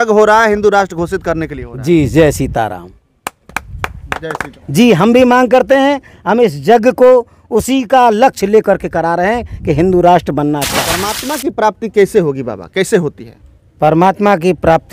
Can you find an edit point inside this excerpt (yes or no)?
yes